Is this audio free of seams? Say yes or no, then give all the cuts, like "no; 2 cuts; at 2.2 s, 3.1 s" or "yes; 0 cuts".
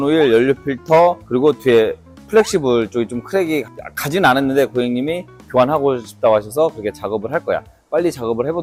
yes; 0 cuts